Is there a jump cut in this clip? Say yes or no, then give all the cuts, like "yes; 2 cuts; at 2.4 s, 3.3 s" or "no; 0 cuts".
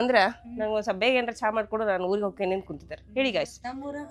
no; 0 cuts